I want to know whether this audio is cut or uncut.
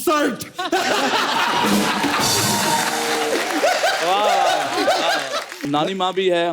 cut